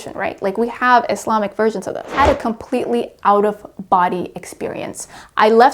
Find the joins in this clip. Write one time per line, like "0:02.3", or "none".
0:02.1

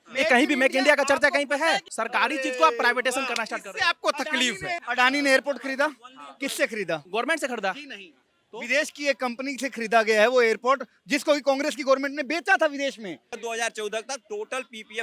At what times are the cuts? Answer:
0:01.9
0:04.8
0:13.4

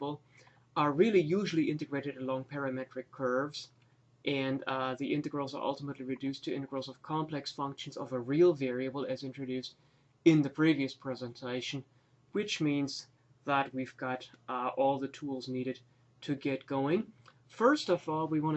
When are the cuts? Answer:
0:10.9

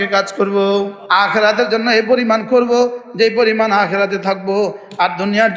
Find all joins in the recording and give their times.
0:01.0

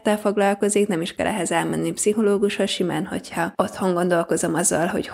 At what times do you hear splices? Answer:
none

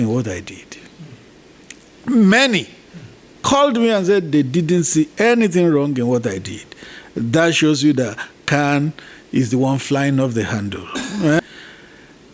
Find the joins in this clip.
0:11.4

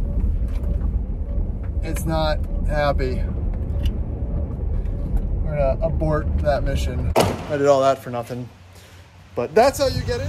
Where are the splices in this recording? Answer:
0:07.1

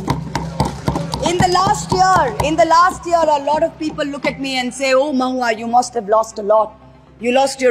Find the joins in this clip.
none

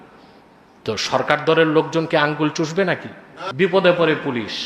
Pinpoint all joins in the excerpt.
0:03.5

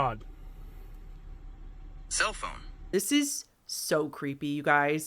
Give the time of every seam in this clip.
0:02.8

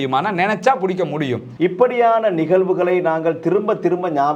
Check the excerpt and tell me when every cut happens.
0:01.4

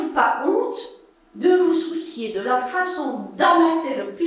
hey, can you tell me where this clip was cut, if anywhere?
none

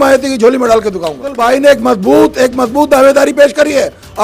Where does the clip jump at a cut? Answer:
0:01.3

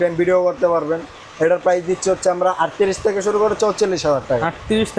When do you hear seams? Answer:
none

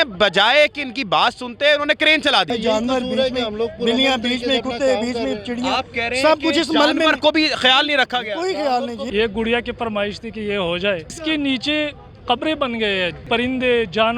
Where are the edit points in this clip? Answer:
0:02.5
0:09.0
0:11.1
0:13.2

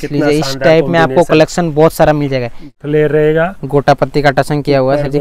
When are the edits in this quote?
0:02.8

